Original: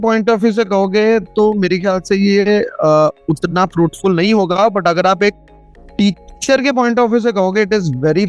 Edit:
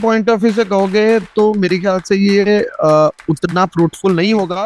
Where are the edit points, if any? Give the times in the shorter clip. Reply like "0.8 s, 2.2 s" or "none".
none

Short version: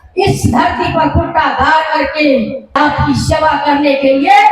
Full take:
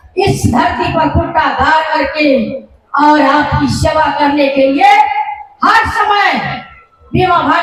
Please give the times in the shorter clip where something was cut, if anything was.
2.8 s

